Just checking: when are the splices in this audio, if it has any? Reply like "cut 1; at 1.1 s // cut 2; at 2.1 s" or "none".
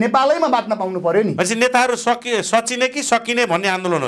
none